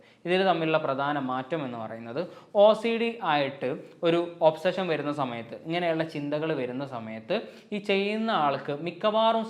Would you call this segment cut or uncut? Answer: uncut